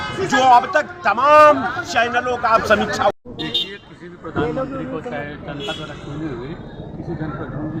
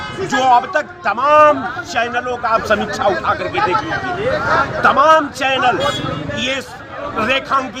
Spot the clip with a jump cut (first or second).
first